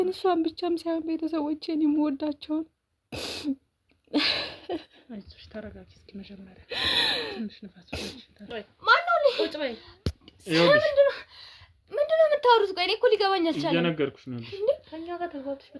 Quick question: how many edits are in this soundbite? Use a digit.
1